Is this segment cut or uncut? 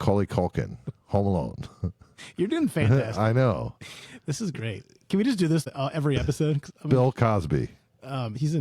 cut